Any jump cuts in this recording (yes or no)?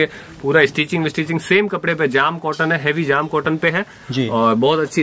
no